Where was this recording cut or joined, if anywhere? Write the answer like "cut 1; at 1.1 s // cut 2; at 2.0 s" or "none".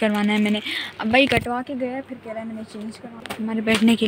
cut 1; at 3.1 s